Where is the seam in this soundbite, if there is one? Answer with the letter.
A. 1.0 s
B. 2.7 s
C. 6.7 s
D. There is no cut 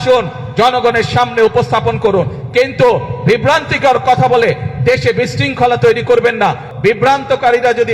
C